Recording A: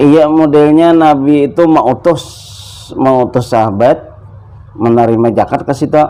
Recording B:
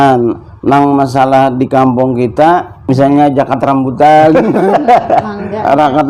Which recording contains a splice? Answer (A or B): B